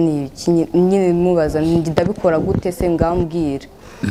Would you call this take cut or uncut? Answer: uncut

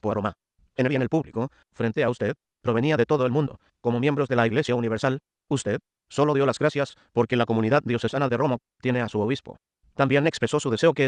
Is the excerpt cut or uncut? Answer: uncut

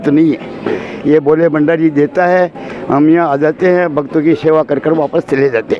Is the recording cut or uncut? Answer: uncut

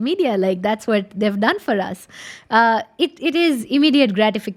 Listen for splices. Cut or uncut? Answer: uncut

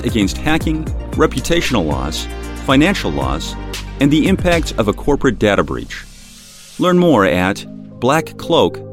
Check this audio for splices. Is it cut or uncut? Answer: uncut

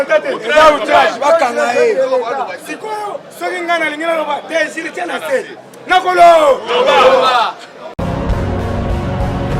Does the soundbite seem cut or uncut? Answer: cut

